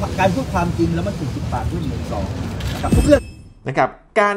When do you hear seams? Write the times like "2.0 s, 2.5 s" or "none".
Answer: 3.2 s